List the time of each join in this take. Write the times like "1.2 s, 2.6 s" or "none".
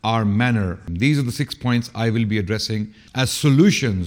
0.9 s, 3.0 s